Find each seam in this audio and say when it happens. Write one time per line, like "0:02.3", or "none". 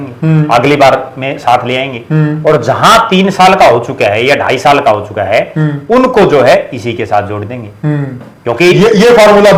none